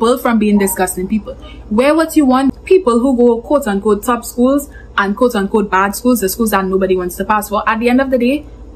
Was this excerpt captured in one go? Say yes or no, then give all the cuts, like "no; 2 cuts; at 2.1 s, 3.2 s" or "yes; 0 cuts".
no; 1 cut; at 2.5 s